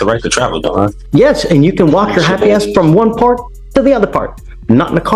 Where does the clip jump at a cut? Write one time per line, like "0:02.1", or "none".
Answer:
0:01.0